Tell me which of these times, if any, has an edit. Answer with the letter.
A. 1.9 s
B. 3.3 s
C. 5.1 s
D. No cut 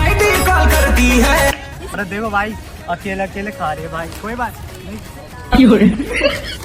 A